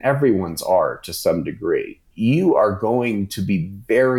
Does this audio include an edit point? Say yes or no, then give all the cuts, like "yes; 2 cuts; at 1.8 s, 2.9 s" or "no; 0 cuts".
yes; 1 cut; at 2.0 s